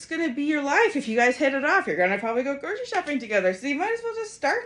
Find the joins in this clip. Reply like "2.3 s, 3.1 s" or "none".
none